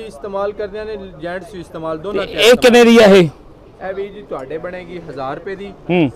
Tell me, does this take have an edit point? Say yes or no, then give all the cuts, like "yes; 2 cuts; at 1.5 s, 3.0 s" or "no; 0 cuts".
no; 0 cuts